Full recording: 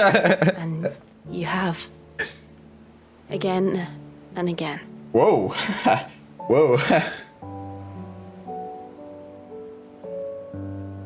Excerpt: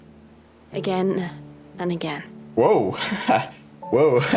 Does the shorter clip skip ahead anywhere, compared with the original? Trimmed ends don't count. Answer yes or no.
no